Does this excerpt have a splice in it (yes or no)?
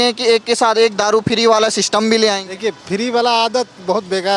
no